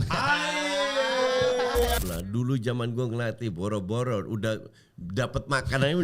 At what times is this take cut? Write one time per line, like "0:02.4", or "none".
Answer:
0:02.0